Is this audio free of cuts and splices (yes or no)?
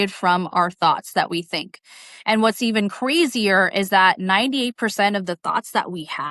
yes